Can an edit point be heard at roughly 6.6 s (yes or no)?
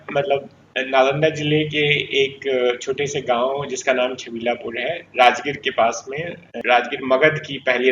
yes